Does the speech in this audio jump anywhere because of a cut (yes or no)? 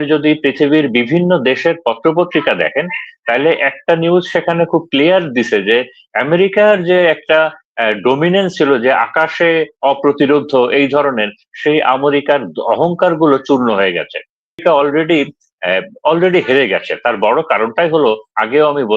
yes